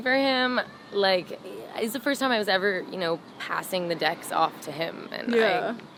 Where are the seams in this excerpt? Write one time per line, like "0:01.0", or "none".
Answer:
none